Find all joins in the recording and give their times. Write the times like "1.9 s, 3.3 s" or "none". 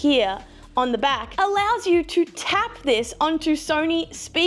none